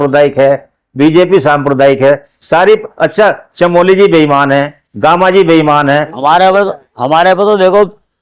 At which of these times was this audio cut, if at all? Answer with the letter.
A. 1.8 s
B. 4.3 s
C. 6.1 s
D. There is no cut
C